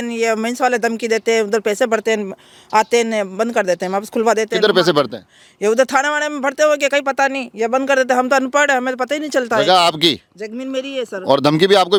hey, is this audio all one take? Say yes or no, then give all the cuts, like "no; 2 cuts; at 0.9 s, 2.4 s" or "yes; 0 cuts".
yes; 0 cuts